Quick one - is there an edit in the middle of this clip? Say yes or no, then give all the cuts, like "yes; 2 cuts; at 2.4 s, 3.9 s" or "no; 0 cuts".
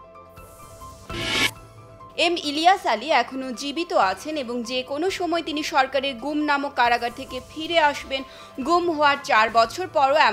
yes; 1 cut; at 1.0 s